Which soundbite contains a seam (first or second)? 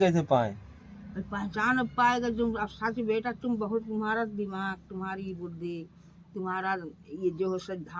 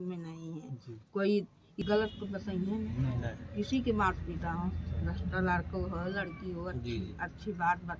second